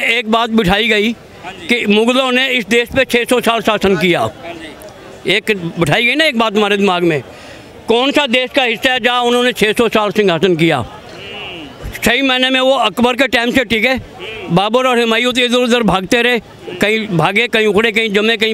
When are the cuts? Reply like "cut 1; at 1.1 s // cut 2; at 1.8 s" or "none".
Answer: none